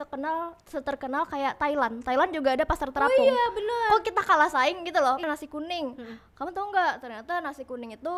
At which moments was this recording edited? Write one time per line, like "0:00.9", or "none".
0:05.2

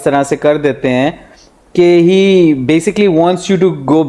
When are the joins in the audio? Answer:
none

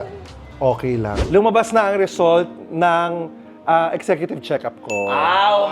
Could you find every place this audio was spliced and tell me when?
0:01.2

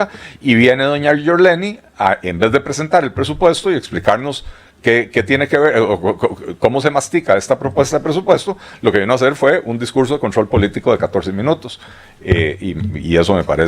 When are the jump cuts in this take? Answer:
none

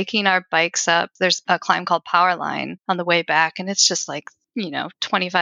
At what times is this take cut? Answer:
0:01.2
0:02.7
0:04.4

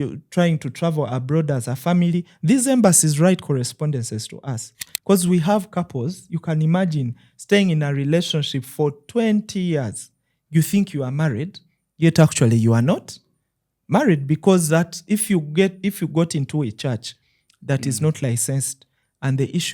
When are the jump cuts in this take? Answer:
0:04.9

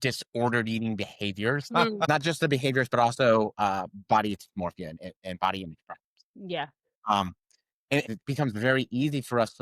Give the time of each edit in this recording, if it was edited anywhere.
0:02.1
0:08.0

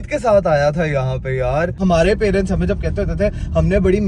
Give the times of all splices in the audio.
0:01.8

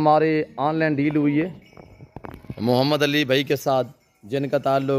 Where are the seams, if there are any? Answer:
none

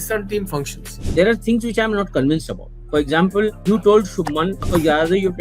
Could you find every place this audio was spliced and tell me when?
0:01.0
0:03.6
0:04.6

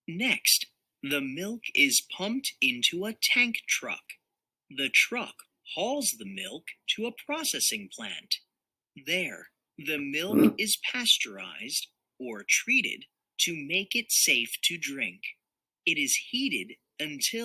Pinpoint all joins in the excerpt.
0:00.9

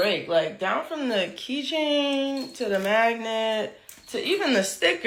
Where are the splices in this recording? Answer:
none

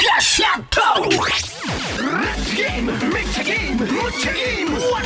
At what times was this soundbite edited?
0:01.3

